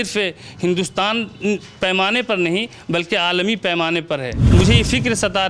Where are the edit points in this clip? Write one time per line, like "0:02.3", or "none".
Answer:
0:04.3